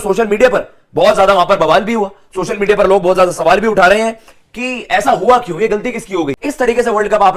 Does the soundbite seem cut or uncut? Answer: cut